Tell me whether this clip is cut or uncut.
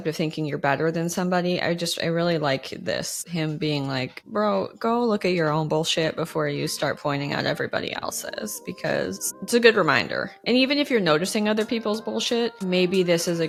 uncut